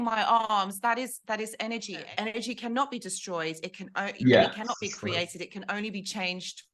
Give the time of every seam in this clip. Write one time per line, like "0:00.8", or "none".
0:02.1